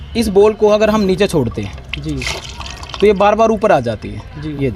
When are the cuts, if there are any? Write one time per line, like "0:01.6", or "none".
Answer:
none

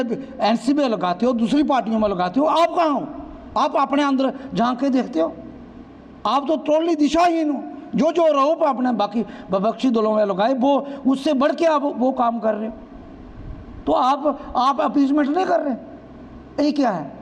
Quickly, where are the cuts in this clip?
none

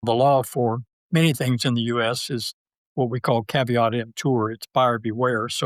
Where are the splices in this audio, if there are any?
0:00.9

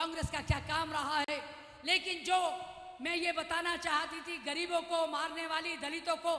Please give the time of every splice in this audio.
0:01.3

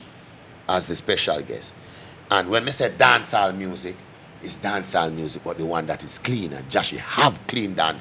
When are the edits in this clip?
none

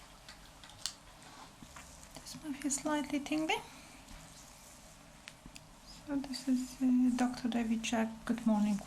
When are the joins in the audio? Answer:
0:01.6
0:05.5

